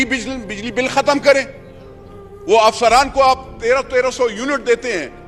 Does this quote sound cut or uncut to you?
uncut